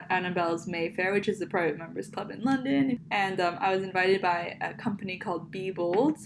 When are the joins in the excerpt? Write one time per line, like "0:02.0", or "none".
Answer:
0:03.0